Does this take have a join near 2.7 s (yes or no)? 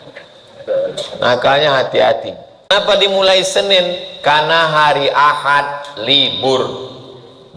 yes